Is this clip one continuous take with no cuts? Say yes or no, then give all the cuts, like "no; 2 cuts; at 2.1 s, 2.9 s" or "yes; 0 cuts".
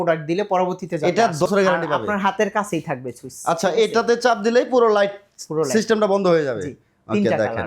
no; 1 cut; at 1.5 s